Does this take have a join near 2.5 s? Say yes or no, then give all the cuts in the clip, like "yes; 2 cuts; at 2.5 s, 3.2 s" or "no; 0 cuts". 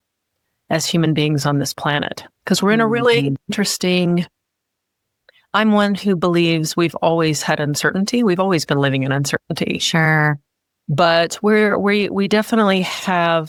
no; 0 cuts